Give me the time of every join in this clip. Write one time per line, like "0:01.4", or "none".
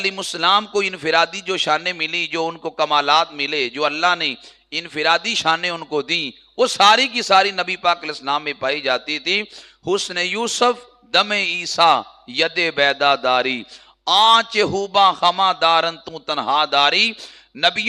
none